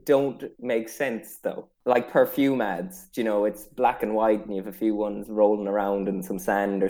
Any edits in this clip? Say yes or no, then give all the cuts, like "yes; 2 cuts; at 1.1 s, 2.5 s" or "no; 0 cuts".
yes; 1 cut; at 1.7 s